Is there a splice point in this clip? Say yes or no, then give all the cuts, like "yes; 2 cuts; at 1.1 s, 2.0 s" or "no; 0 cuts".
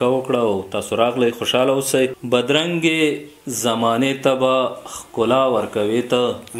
yes; 1 cut; at 2.2 s